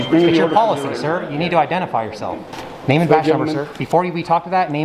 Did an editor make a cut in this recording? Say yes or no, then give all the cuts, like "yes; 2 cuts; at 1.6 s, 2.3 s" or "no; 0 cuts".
yes; 1 cut; at 2.5 s